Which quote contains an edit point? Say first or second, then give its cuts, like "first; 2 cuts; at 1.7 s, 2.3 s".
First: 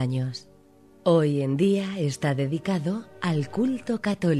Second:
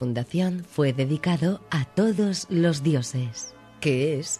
second; 1 cut; at 2.2 s